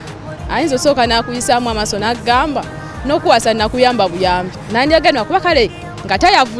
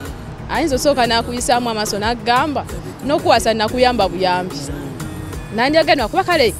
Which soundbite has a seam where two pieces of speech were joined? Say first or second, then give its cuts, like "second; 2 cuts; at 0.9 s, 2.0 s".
first; 1 cut; at 4.6 s